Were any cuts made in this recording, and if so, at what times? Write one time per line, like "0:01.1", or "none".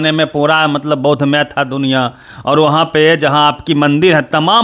none

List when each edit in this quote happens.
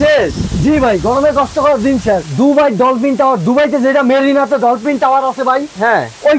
0:02.2

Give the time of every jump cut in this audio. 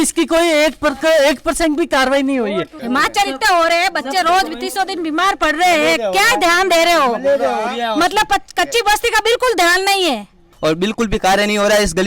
0:02.7
0:10.5

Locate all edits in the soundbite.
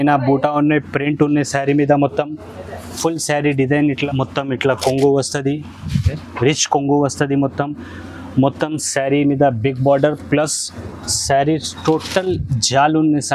0:04.0

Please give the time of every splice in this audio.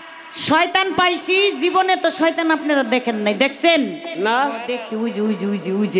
0:04.8

